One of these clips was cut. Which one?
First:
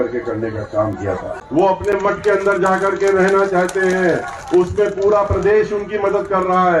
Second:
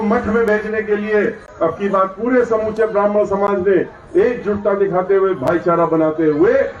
first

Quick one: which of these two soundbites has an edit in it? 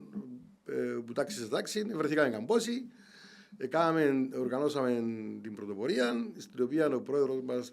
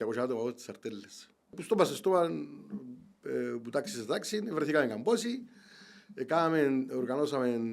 second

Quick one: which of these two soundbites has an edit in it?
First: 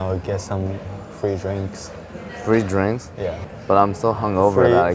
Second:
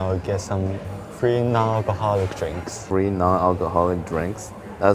second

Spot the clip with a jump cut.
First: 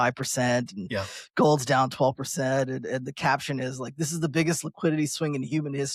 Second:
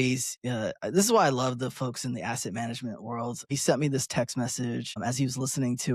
second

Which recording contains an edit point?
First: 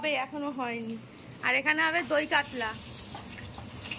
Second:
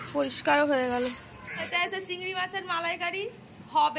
second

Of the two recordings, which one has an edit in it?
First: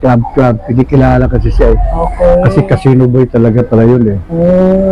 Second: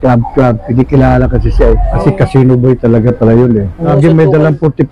second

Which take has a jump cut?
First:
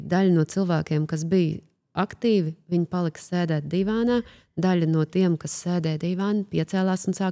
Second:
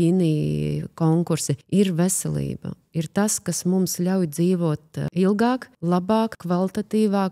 second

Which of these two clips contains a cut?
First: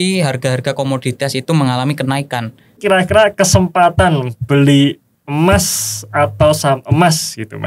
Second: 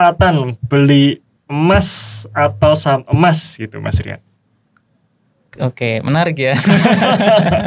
first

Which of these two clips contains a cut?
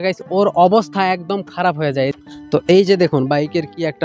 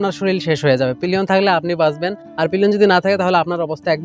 first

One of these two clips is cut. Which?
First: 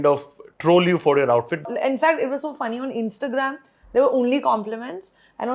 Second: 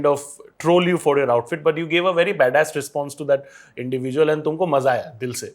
first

